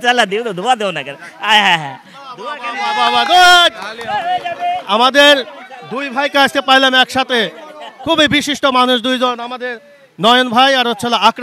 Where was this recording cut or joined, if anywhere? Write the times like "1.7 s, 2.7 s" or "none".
none